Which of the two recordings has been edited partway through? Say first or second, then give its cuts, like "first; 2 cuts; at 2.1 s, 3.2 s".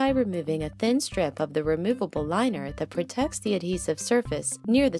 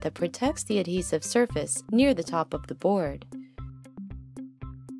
second; 1 cut; at 3.2 s